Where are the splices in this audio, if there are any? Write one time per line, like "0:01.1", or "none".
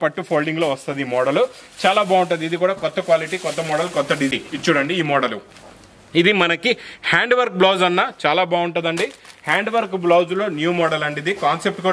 0:04.3